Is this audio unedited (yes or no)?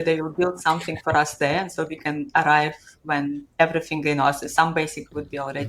yes